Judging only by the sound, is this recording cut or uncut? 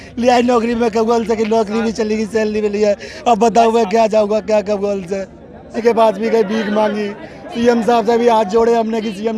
cut